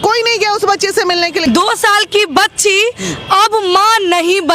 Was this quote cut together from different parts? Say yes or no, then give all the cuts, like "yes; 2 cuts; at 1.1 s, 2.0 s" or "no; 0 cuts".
yes; 1 cut; at 1.4 s